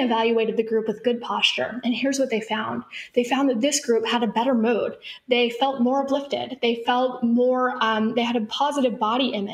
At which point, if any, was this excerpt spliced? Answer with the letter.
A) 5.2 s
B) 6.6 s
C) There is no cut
C